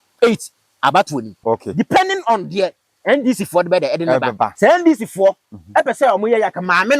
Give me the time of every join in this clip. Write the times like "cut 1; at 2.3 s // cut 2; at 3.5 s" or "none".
cut 1; at 1.3 s // cut 2; at 4.5 s